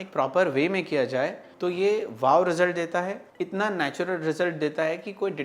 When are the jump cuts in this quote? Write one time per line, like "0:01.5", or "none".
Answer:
0:01.4
0:03.2